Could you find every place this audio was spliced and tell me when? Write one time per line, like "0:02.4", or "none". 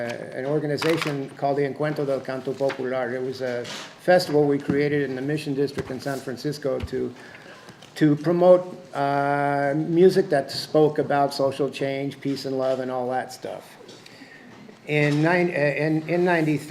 0:11.8